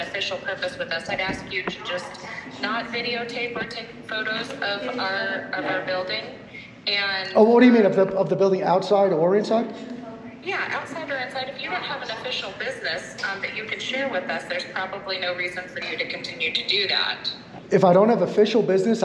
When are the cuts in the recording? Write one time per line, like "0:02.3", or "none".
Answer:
0:17.5